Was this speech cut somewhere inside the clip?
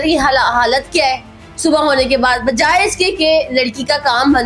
no; 0 cuts

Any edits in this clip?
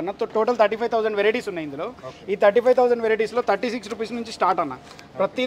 no; 0 cuts

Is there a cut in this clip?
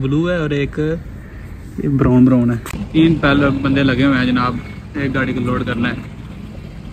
yes; 1 cut; at 2.7 s

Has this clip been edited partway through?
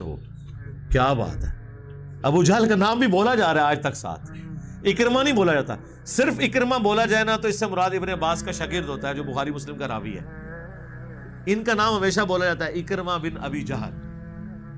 yes; 3 cuts; at 10.2 s, 11.4 s, 13.8 s

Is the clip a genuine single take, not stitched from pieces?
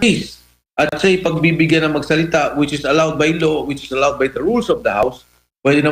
yes; 0 cuts

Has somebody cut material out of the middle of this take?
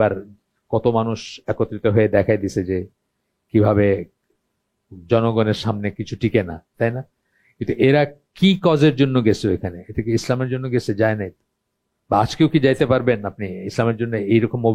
no; 0 cuts

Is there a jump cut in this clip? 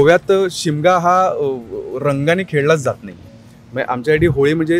no; 0 cuts

